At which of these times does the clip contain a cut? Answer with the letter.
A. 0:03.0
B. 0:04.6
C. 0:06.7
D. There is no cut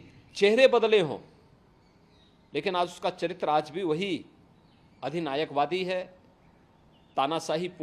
D